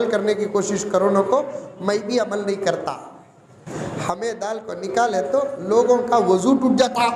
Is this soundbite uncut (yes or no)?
yes